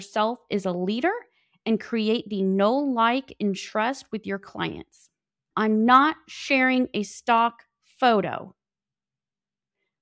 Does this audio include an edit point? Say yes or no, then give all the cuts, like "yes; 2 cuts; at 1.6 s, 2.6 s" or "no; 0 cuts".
yes; 1 cut; at 5.4 s